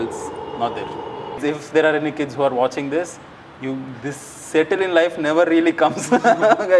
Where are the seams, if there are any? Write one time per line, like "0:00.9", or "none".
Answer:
0:01.4